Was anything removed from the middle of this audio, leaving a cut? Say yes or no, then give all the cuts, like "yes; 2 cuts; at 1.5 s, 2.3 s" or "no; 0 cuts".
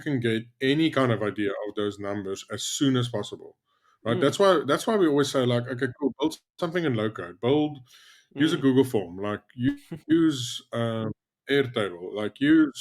no; 0 cuts